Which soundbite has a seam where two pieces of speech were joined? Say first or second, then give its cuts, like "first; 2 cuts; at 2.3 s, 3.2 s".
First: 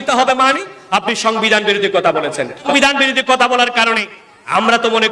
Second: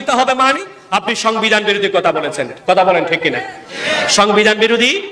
first; 1 cut; at 2.7 s